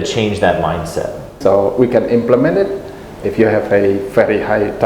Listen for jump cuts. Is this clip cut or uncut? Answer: cut